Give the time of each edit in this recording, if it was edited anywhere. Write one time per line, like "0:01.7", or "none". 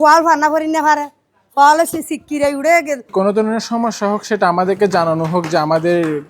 0:03.1